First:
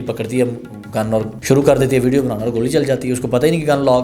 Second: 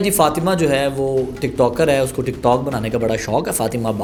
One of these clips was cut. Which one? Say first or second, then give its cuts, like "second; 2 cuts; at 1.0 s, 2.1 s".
first; 1 cut; at 1.3 s